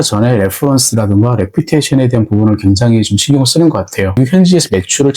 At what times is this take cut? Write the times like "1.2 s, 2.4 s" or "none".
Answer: 4.2 s

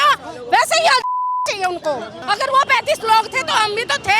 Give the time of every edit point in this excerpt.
2.2 s

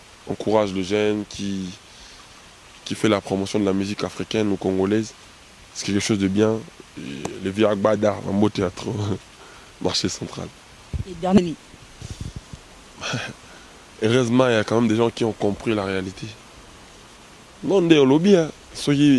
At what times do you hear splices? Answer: 11.4 s

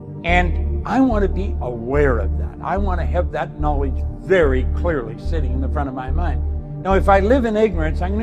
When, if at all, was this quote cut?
none

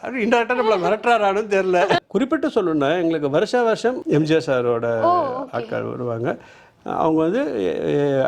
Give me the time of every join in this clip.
2.0 s, 4.0 s

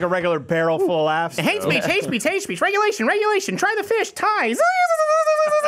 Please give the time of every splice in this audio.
1.4 s

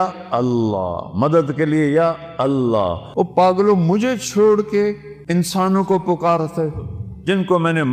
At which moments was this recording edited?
3.0 s, 5.1 s

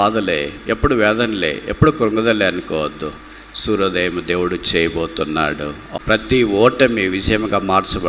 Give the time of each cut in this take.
5.8 s

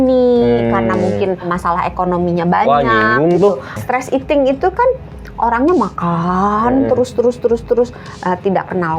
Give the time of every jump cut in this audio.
3.8 s

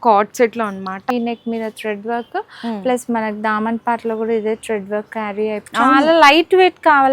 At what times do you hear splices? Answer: 1.1 s, 5.6 s

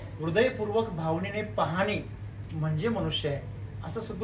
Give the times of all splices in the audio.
none

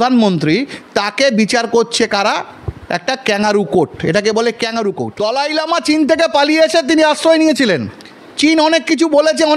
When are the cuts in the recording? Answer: 5.1 s

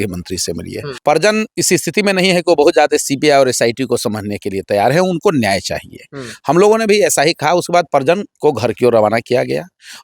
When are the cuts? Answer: 0.9 s

